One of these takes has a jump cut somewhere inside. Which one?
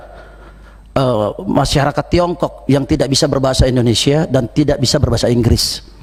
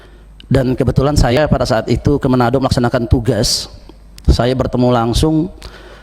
second; 1 cut; at 1.3 s

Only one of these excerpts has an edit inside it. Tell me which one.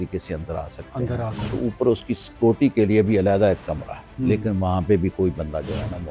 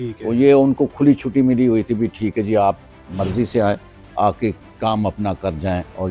first; 2 cuts; at 1.6 s, 4.1 s

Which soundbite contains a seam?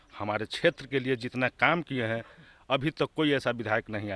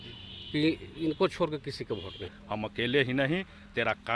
second; 1 cut; at 2.3 s

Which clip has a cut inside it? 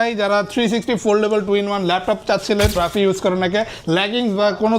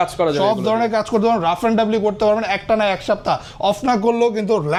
first; 1 cut; at 2.8 s

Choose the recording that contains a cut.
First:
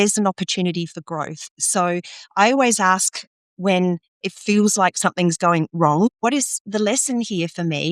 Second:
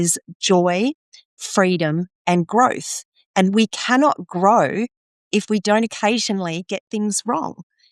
first; 1 cut; at 6.1 s

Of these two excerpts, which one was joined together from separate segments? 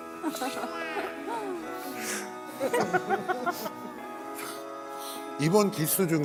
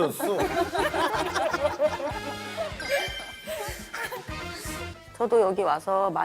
second; 1 cut; at 5.0 s

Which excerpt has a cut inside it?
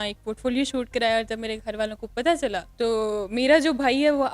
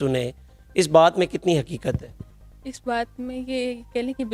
first; 1 cut; at 2.6 s

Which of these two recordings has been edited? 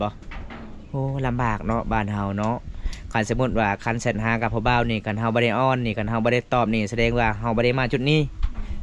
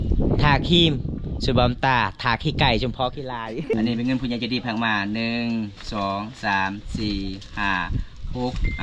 second; 1 cut; at 3.7 s

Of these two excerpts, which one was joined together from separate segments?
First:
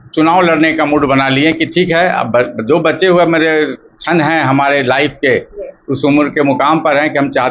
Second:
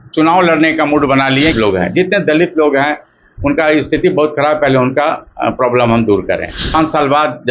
second; 2 cuts; at 1.6 s, 6.7 s

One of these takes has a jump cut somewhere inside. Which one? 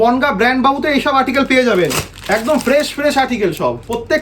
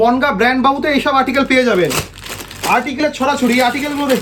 first; 1 cut; at 2.1 s

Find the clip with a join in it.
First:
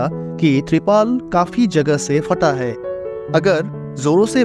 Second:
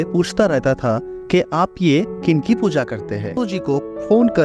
second; 1 cut; at 3.4 s

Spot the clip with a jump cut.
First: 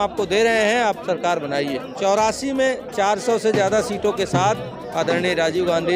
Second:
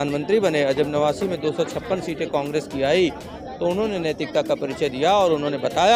first; 1 cut; at 1.9 s

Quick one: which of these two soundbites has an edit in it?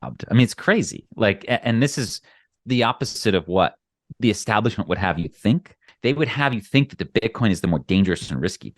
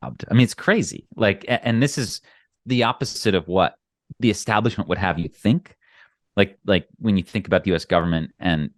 first; 1 cut; at 5.9 s

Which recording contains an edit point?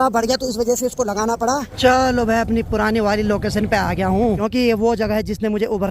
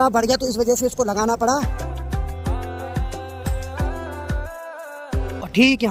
first; 2 cuts; at 1.7 s, 4.4 s

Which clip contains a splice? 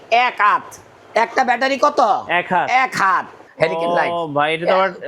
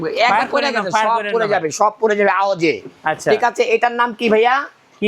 first; 1 cut; at 3.4 s

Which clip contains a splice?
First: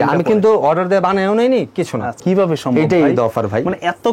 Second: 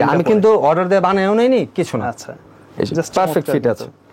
first; 1 cut; at 2.1 s

